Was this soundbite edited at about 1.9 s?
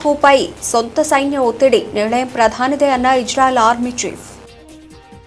no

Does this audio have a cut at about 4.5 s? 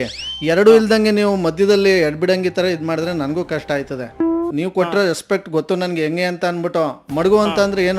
yes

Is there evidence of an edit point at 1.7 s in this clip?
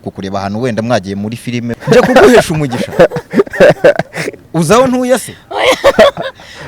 yes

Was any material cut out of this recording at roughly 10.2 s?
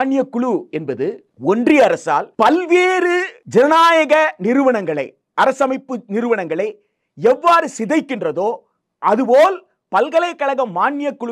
no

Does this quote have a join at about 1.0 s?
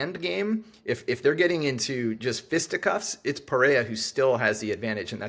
no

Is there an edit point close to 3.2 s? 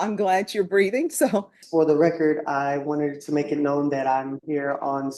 no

